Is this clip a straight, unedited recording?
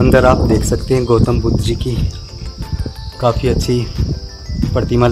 yes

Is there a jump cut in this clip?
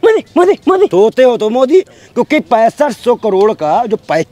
yes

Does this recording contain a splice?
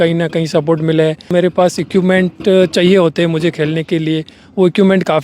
yes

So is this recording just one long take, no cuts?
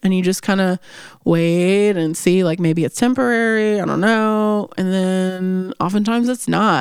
yes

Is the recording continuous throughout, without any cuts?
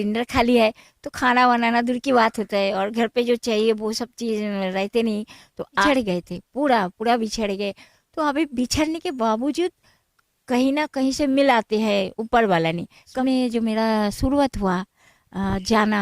no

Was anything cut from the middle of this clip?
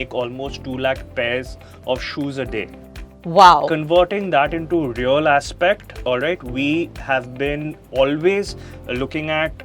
no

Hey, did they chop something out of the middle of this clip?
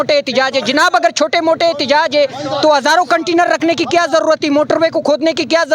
no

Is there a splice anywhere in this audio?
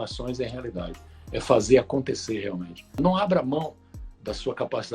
yes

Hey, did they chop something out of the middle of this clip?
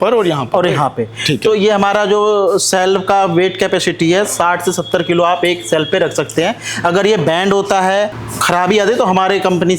no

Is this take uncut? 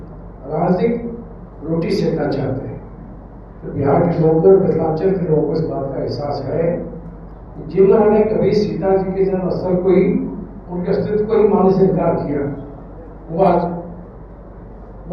yes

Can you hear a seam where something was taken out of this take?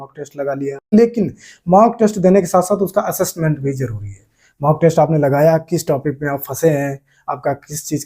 yes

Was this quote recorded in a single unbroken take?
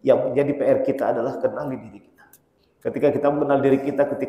no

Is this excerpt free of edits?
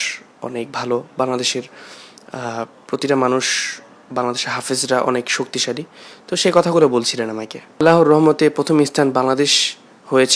no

